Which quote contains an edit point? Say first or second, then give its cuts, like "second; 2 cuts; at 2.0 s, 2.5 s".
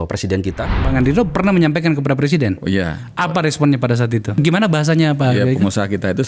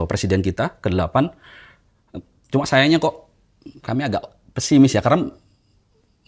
first; 2 cuts; at 0.8 s, 4.4 s